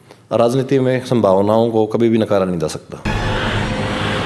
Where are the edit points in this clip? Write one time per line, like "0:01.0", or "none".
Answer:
0:03.1